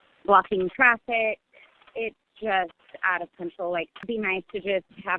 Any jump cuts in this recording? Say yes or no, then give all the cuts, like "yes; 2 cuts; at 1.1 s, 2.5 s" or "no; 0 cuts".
yes; 1 cut; at 4.0 s